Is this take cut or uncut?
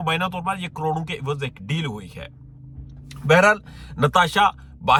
uncut